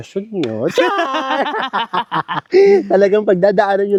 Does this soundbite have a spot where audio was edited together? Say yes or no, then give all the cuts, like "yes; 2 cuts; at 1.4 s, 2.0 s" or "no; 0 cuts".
no; 0 cuts